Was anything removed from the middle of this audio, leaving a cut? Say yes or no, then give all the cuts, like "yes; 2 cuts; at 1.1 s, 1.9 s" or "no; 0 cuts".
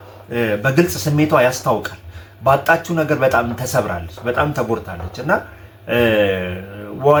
no; 0 cuts